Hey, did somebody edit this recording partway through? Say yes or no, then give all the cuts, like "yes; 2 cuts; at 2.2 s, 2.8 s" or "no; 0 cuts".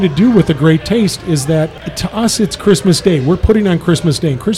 yes; 1 cut; at 1.8 s